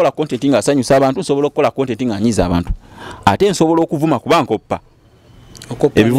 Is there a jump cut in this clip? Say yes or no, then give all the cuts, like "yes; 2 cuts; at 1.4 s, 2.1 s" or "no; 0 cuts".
no; 0 cuts